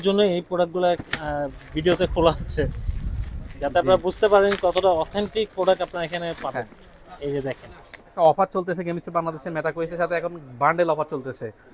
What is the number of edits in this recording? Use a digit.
1